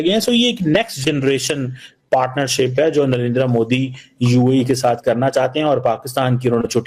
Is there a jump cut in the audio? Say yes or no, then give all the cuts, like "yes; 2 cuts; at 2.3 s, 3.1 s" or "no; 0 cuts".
no; 0 cuts